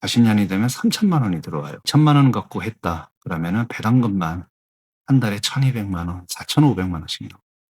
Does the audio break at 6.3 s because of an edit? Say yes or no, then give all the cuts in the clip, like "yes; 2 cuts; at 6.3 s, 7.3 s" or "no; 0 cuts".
no; 1 cut; at 1.9 s